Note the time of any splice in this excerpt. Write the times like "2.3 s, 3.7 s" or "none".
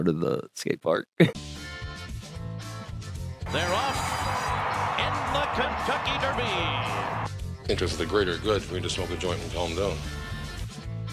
1.4 s